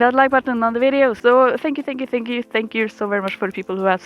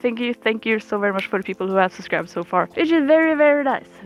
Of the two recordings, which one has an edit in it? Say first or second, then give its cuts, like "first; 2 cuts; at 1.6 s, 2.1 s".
first; 1 cut; at 1.2 s